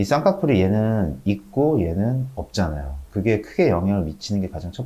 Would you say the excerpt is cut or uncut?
uncut